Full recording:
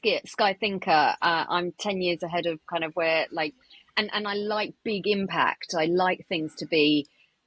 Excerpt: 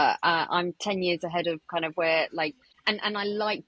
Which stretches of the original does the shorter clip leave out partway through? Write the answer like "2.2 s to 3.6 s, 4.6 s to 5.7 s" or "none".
3.7 s to 3.8 s